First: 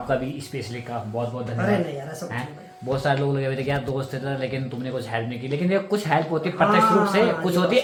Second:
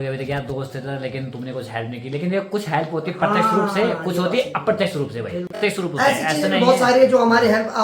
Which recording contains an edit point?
second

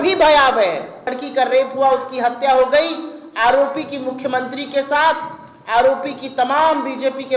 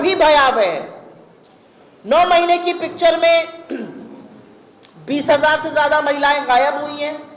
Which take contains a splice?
first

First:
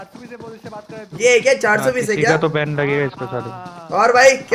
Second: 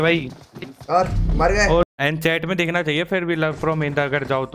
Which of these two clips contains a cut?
second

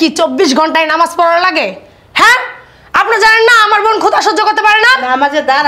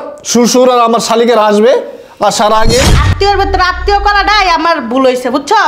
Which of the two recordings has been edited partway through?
second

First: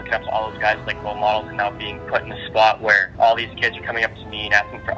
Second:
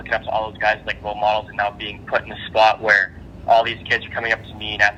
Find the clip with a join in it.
first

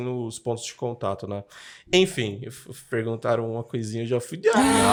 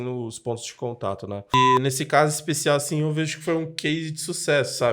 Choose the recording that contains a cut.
second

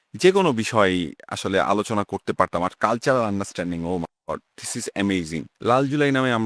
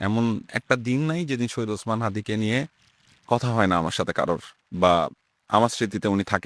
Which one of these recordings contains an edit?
first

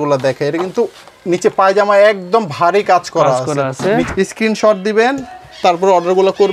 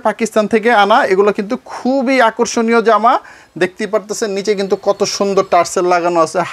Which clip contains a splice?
first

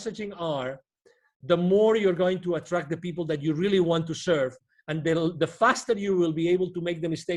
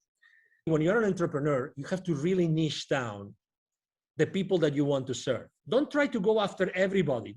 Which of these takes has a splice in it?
second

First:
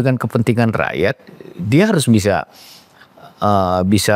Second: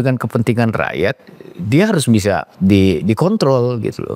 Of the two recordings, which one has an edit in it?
second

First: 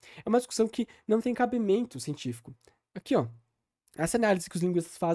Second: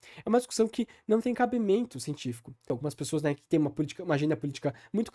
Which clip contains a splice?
second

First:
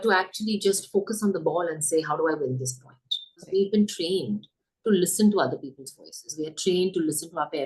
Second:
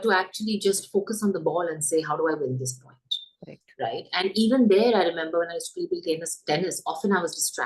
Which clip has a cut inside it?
first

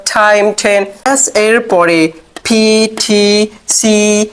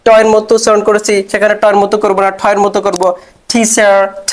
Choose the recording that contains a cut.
first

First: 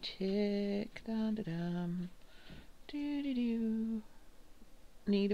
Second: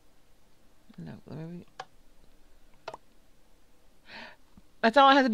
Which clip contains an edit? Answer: first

